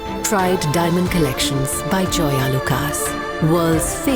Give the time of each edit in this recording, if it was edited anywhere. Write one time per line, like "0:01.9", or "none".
none